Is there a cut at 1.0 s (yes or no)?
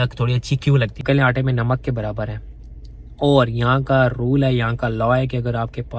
yes